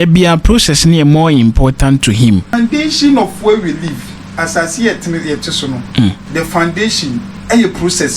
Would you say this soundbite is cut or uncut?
cut